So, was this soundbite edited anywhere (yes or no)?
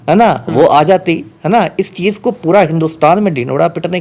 no